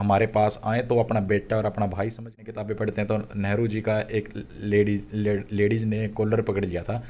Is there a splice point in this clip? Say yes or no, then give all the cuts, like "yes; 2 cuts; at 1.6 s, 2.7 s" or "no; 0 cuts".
yes; 1 cut; at 2.4 s